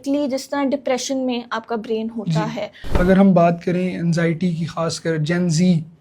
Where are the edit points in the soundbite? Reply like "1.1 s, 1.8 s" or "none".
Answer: 2.9 s